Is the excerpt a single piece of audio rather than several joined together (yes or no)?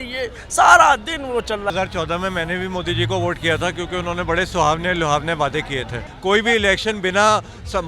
no